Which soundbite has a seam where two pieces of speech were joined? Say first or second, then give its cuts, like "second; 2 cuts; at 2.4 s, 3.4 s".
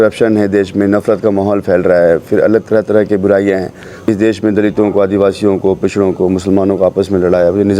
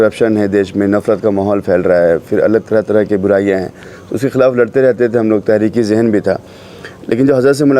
first; 1 cut; at 3.9 s